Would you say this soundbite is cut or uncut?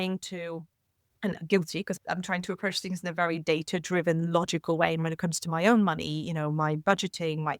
cut